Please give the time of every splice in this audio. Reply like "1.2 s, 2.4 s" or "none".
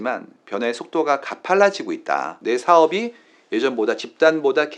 2.3 s